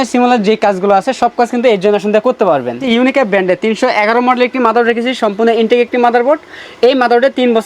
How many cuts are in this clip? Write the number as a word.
one